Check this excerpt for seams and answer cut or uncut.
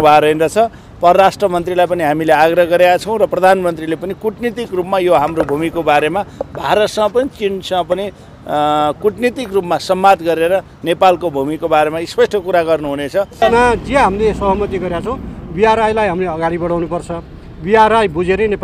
cut